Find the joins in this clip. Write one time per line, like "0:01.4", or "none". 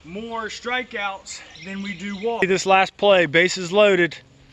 0:02.4